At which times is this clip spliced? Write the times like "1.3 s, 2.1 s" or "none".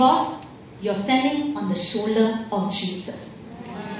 none

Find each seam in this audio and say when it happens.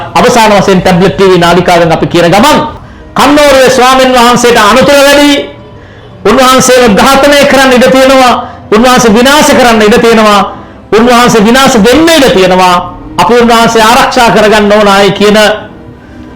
2.8 s

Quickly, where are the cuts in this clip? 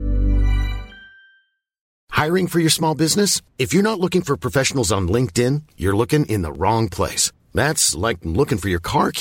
1.8 s

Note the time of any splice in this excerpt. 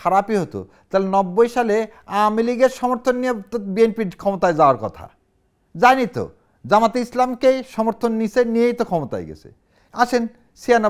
none

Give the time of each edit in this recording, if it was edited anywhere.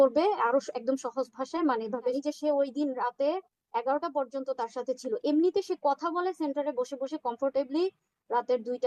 2.2 s

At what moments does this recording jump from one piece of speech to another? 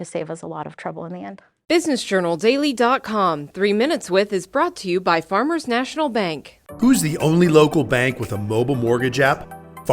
1.5 s

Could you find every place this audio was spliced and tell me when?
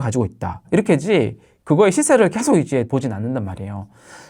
2.9 s

